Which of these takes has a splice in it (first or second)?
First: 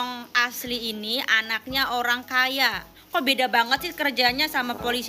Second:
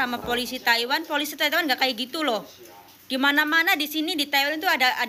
first